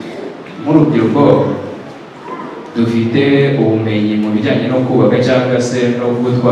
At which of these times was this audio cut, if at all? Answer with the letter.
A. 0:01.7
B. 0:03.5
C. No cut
C